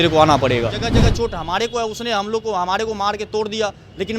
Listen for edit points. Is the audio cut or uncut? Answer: cut